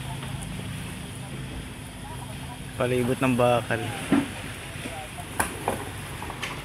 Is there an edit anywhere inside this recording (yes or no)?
no